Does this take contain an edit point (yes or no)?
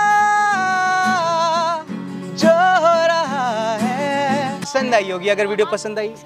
yes